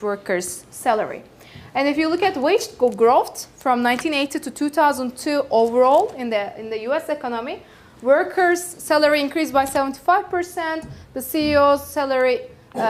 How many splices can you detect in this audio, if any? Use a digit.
1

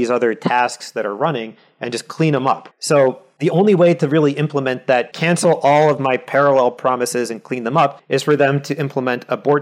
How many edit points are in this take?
4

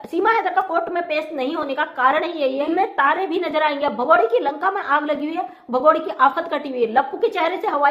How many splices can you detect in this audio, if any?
1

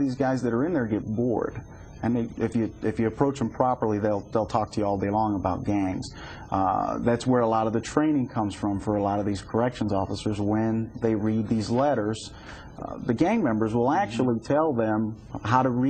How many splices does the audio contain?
1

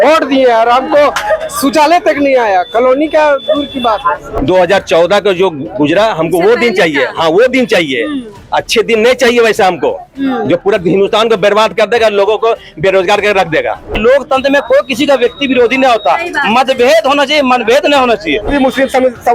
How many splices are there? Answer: 3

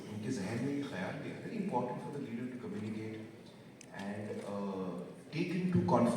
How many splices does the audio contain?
1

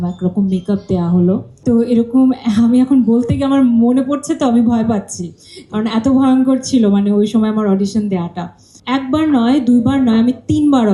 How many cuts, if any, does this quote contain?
2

